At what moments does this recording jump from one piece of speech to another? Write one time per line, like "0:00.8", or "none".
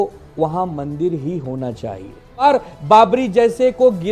0:02.4